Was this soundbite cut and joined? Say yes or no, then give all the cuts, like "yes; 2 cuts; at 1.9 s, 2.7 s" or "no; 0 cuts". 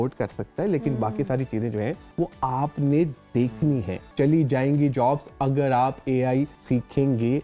yes; 3 cuts; at 2.0 s, 4.0 s, 6.6 s